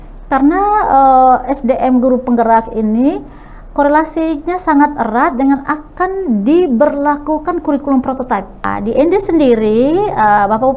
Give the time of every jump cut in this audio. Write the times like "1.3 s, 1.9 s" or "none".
8.7 s